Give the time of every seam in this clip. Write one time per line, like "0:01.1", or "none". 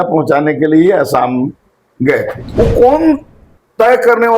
0:02.4